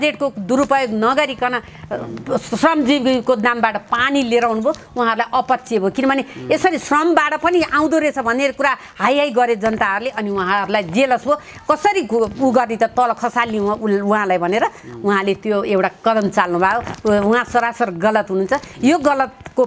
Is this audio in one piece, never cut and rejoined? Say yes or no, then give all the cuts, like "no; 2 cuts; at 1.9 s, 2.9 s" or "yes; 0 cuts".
yes; 0 cuts